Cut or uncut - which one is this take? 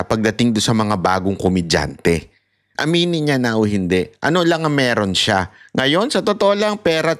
uncut